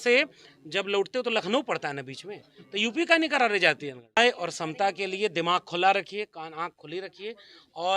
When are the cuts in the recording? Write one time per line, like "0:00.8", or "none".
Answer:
0:04.2